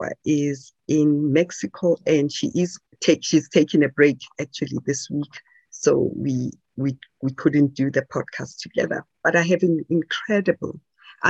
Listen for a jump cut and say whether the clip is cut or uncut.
cut